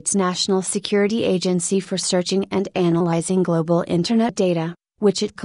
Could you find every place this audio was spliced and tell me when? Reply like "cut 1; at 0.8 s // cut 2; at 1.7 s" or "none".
cut 1; at 4.1 s